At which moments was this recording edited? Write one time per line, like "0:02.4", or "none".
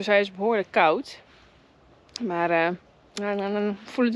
none